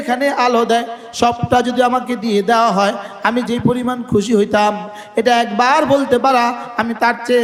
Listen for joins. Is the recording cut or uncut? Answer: uncut